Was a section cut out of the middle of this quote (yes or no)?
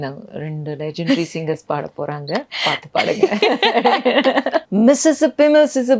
yes